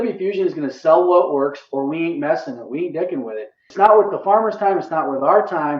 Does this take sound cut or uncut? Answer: cut